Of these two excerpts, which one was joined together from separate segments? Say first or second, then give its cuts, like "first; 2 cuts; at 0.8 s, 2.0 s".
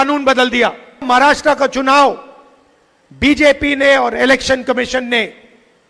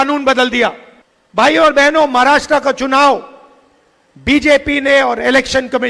first; 1 cut; at 1.1 s